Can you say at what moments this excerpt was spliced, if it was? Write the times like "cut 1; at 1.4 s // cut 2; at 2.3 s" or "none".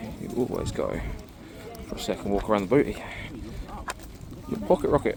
none